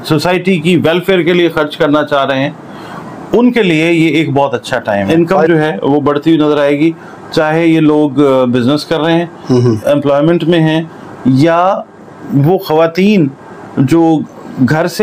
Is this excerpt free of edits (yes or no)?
no